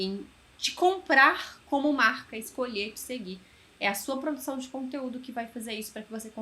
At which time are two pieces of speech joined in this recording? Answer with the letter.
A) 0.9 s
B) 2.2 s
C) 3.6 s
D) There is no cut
B